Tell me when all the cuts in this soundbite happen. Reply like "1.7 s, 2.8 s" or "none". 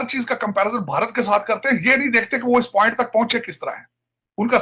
none